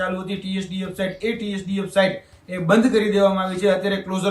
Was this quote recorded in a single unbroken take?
yes; 0 cuts

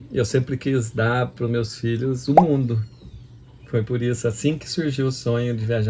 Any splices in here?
no; 0 cuts

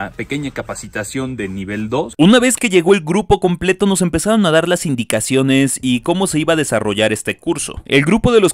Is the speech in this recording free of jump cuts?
yes; 0 cuts

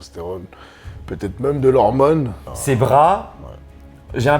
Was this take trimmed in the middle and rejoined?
yes; 1 cut; at 2.5 s

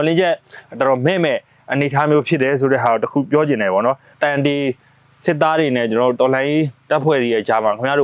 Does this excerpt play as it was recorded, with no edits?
no; 1 cut; at 4.1 s

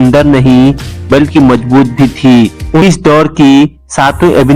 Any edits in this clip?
yes; 1 cut; at 2.8 s

